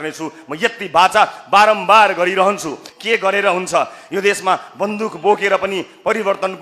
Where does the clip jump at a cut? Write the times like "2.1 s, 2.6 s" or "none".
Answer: 2.9 s